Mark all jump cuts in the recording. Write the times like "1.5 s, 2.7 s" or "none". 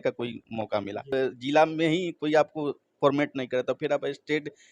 1.1 s